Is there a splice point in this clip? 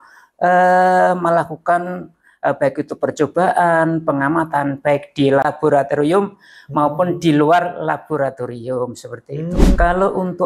yes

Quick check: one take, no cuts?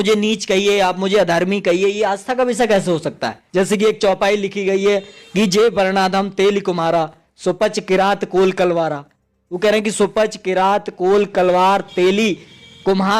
no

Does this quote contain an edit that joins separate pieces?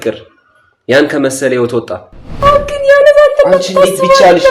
yes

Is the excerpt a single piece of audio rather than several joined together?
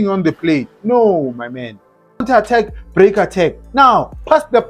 no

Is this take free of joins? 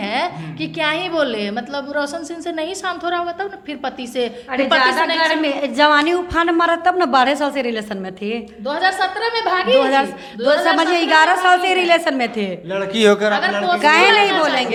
yes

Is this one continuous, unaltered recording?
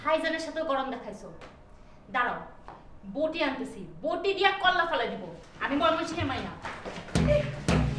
yes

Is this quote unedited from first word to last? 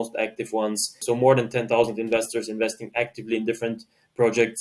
no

